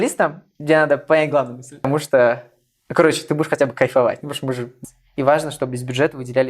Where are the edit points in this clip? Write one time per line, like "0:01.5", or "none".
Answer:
0:01.9
0:04.8